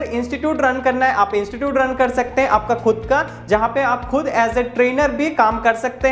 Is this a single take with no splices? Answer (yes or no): yes